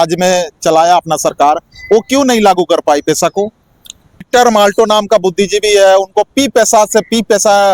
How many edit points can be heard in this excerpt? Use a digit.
1